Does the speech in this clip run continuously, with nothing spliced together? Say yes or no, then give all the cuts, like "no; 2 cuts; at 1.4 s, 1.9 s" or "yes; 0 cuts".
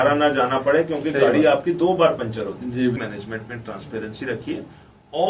no; 1 cut; at 3.0 s